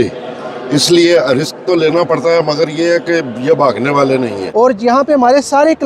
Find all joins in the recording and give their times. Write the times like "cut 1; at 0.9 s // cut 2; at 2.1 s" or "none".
cut 1; at 4.4 s